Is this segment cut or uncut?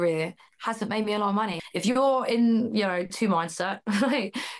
cut